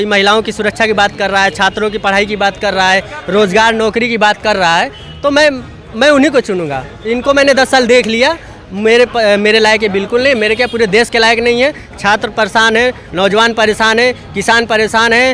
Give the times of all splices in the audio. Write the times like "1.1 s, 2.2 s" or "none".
none